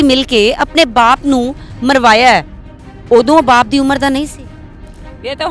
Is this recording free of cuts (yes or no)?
yes